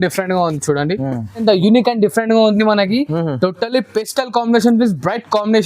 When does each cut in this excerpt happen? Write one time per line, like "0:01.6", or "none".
0:01.4